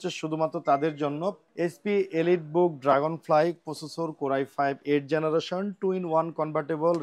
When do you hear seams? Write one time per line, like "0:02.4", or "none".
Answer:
0:01.4